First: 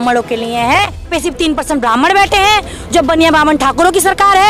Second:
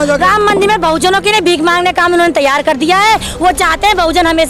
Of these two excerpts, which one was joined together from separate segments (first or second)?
first